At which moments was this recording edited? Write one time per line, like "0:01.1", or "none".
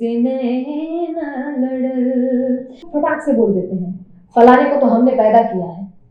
0:02.9